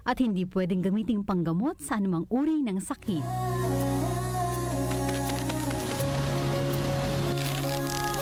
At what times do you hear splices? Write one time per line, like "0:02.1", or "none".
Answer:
none